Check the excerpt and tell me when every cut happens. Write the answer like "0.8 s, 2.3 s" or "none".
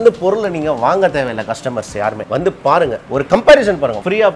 2.2 s